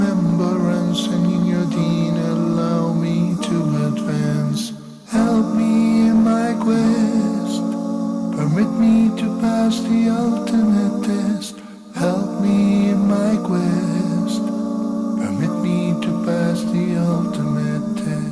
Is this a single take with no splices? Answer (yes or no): no